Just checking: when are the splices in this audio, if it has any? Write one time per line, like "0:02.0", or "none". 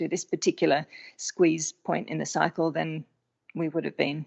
none